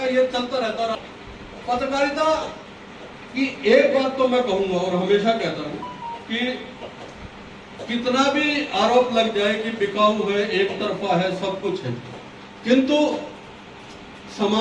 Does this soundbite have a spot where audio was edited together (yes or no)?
yes